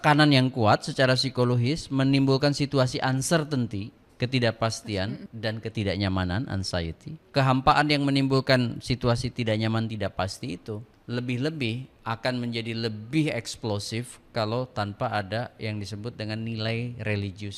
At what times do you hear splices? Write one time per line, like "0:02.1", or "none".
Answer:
0:05.3
0:07.2
0:10.9